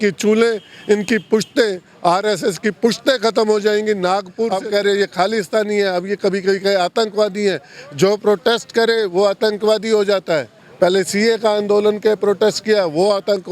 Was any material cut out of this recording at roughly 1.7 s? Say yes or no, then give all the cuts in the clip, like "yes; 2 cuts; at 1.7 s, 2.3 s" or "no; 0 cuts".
no; 2 cuts; at 4.5 s, 10.6 s